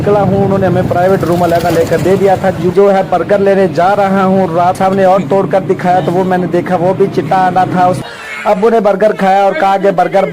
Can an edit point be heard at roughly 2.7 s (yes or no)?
yes